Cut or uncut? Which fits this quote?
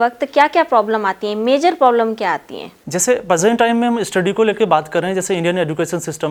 uncut